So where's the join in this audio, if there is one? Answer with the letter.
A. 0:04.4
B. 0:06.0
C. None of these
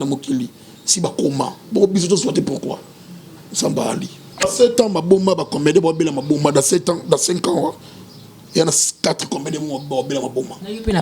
A